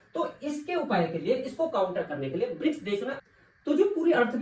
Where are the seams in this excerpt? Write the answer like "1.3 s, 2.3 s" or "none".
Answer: 3.2 s